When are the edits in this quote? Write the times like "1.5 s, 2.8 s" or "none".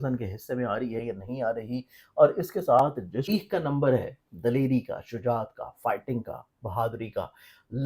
3.3 s